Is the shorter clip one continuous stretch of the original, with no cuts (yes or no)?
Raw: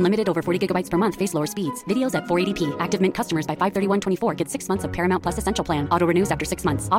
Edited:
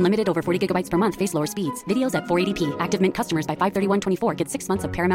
yes